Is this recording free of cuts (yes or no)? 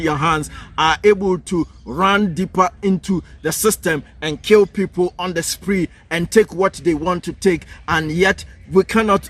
yes